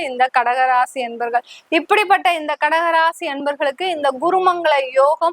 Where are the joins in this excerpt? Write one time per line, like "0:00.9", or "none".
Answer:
none

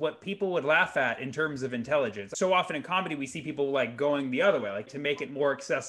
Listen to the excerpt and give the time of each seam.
0:02.2
0:04.9

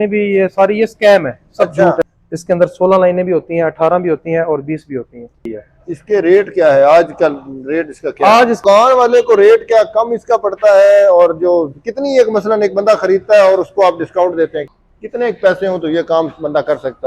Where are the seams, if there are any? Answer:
0:02.0
0:05.5
0:08.6
0:14.6

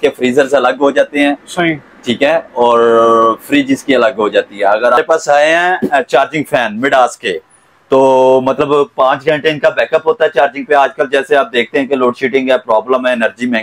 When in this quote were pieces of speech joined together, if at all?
0:05.0

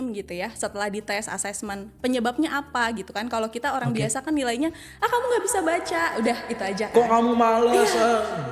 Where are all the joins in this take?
none

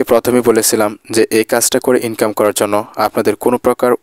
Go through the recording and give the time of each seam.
none

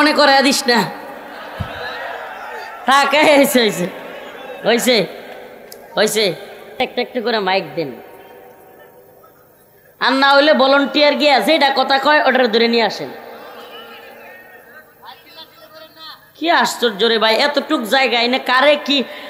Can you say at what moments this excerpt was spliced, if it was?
0:06.6

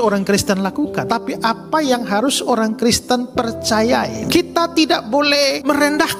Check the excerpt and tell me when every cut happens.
0:04.2

